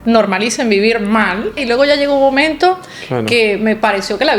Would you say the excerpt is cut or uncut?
cut